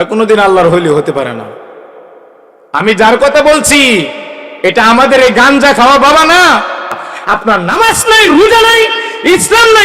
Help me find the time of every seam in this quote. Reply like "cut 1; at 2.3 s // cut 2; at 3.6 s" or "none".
cut 1; at 7.1 s